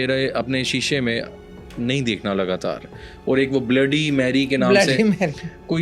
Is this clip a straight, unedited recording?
yes; 0 cuts

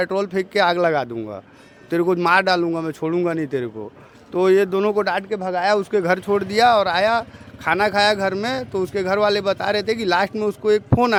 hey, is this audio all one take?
yes; 0 cuts

